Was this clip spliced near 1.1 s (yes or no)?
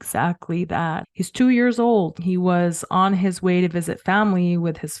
yes